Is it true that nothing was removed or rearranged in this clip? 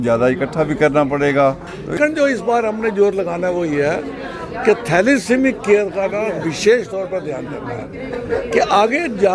no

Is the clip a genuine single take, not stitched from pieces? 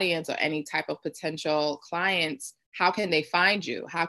yes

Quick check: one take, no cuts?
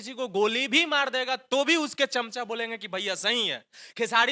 yes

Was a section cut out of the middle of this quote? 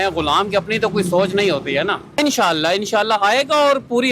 yes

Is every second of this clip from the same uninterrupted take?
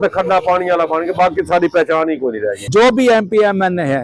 no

